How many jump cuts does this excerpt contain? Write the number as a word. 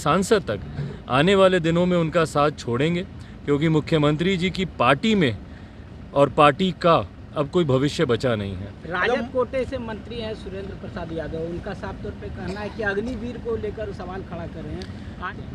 zero